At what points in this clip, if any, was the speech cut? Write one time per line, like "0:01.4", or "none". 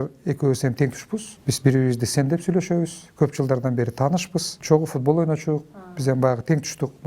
0:01.3
0:04.5